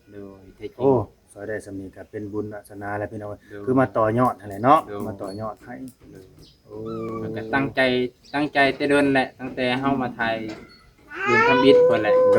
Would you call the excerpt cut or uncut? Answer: uncut